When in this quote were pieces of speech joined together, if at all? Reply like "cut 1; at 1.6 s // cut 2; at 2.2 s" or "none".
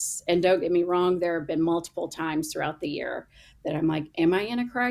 none